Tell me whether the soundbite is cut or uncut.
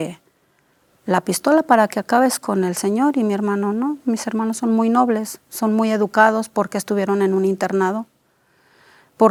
uncut